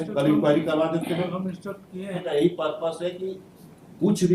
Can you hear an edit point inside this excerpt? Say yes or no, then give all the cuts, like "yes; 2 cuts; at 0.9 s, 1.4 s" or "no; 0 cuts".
yes; 1 cut; at 2.2 s